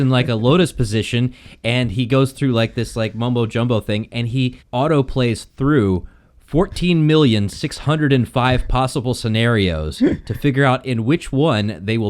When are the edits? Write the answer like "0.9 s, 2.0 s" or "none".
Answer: 4.6 s